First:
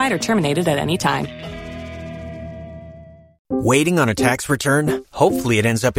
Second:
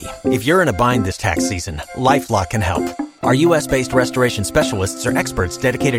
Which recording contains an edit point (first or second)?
first